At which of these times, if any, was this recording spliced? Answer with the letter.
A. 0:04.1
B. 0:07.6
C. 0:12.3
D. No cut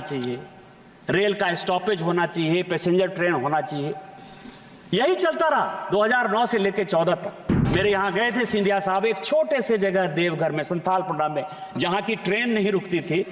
B